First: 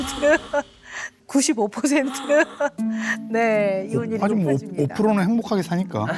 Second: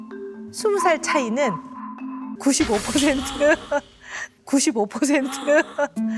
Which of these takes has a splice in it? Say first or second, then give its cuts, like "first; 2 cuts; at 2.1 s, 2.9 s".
second; 1 cut; at 2.3 s